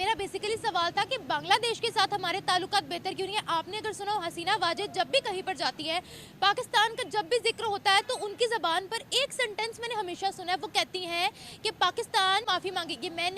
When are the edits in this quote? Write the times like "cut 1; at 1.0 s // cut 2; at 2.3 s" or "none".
cut 1; at 12.5 s